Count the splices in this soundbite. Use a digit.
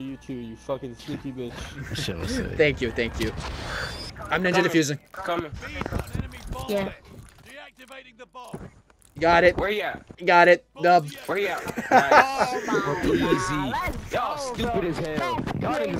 1